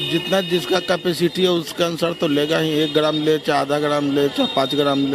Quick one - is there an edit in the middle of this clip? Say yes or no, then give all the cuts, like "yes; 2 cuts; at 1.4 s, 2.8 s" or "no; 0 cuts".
no; 0 cuts